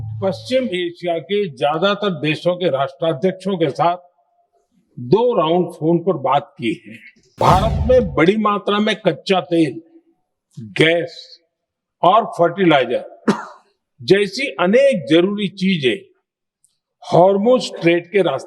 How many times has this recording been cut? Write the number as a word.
one